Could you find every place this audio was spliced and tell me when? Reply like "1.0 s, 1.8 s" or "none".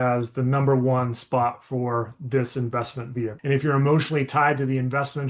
3.3 s